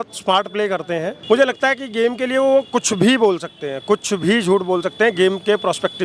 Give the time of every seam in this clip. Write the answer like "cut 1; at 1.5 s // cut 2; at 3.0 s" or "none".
cut 1; at 1.1 s